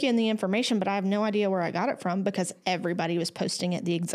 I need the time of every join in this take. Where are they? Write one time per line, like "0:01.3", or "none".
none